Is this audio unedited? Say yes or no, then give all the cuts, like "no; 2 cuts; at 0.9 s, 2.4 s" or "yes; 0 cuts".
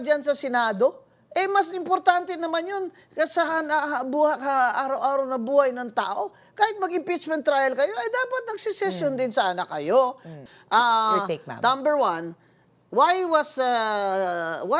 no; 1 cut; at 10.3 s